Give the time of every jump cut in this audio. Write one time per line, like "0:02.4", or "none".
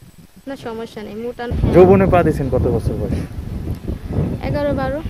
0:01.5